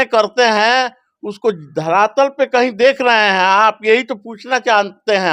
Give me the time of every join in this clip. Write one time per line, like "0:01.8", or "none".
none